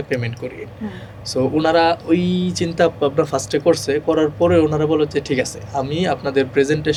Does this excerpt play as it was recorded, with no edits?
yes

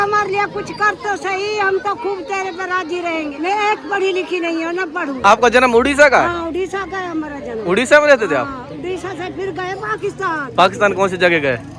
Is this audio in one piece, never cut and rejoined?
no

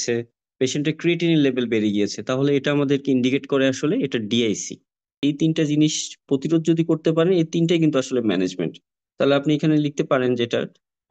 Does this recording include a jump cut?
yes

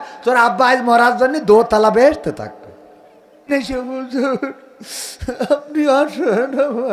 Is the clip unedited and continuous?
no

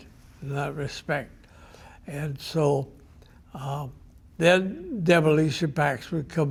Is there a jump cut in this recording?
no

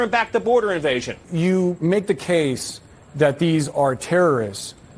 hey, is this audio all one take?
yes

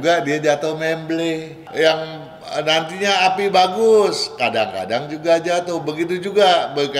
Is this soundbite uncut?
no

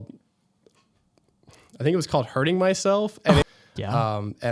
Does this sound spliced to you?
yes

